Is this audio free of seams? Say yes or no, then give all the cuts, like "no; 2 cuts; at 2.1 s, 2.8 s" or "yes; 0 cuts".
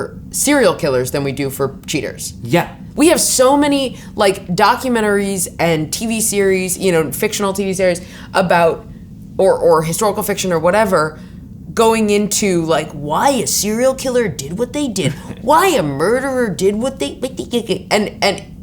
no; 1 cut; at 2.9 s